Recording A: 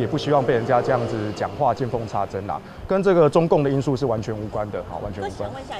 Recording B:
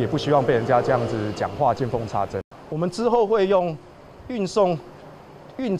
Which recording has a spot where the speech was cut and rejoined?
B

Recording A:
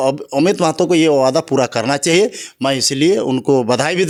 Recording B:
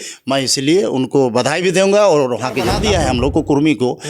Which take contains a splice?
B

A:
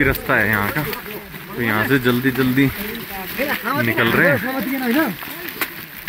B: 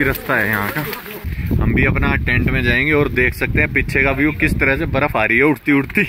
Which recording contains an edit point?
B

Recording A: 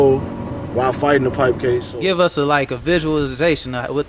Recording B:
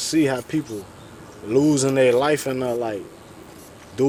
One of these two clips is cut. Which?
A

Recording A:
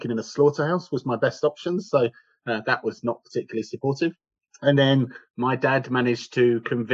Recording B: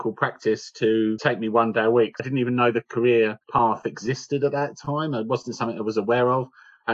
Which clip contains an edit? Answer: B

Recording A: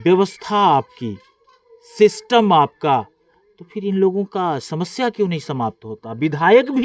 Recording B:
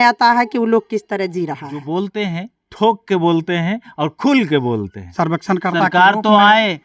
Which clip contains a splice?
B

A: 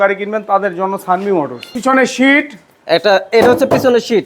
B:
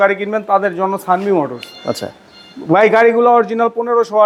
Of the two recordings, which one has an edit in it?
A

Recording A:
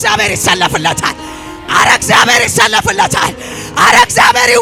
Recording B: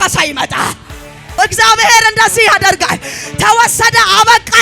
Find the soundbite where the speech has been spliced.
B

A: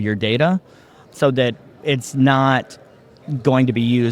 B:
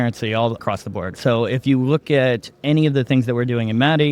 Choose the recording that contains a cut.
B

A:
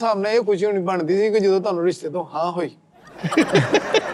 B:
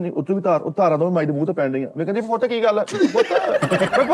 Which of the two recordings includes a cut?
A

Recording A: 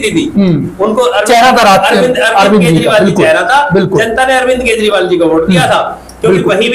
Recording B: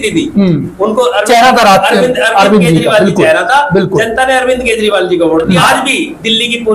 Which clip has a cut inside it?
B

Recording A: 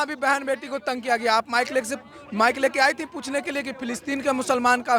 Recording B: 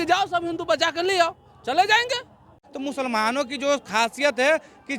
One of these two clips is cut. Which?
B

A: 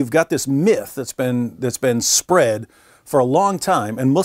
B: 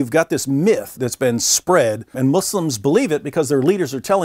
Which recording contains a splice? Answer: B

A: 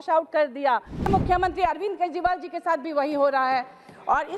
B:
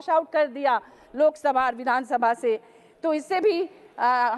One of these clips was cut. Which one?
A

